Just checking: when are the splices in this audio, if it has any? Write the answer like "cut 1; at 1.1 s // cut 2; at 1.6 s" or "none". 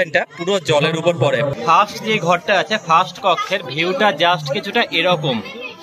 cut 1; at 1.5 s